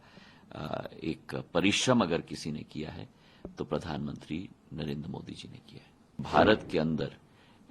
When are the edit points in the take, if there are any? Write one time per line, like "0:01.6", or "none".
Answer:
0:06.2